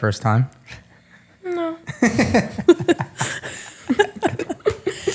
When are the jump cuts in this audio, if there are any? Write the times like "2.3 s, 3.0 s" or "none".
none